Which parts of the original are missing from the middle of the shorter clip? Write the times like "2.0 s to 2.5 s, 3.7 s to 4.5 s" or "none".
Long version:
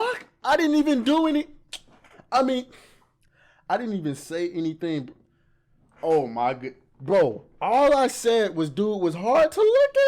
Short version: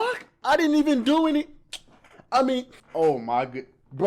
2.8 s to 5.9 s